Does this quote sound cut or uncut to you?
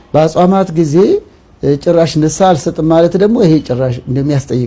uncut